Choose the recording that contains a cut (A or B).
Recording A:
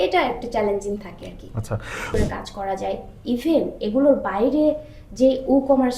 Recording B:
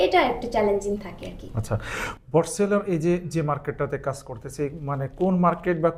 A